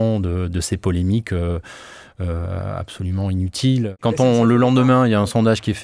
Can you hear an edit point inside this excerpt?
yes; 1 cut; at 4.0 s

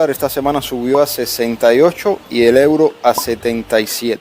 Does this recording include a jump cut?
no; 0 cuts

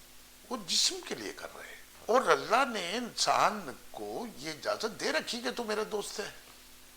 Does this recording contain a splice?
yes; 1 cut; at 1.8 s

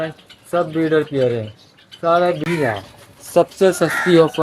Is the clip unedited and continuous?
no; 1 cut; at 2.4 s

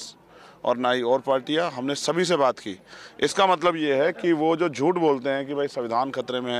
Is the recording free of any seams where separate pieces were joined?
yes; 0 cuts

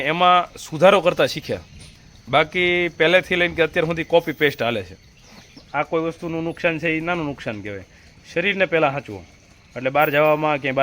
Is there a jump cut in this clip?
yes; 1 cut; at 5.6 s

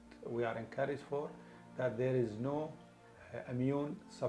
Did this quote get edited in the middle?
no; 0 cuts

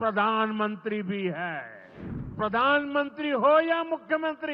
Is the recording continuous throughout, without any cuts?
no; 1 cut; at 2.3 s

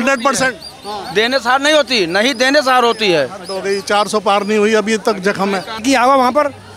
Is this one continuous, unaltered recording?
no; 1 cut; at 5.8 s

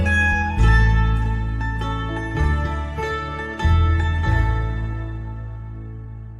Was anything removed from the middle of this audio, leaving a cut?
no; 0 cuts

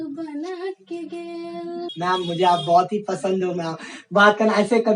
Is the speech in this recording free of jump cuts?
no; 1 cut; at 1.8 s

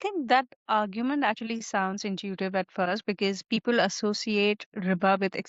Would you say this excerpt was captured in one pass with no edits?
yes; 0 cuts

